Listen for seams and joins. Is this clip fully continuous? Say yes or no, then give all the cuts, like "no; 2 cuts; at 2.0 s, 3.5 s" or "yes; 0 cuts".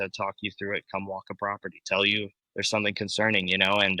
no; 1 cut; at 2.4 s